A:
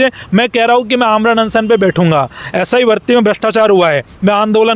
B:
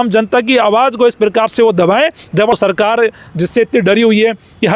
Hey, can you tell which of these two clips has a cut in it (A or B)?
B